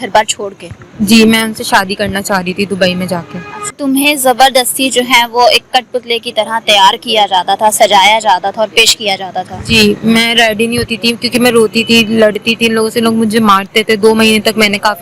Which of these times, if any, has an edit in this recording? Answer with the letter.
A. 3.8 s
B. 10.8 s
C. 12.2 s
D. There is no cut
A